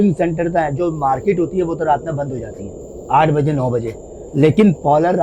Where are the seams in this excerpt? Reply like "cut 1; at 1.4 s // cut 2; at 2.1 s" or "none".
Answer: none